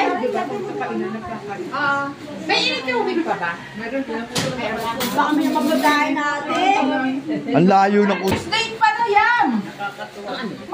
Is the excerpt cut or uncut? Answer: cut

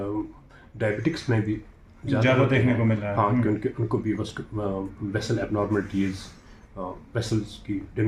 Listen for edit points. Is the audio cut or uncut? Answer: uncut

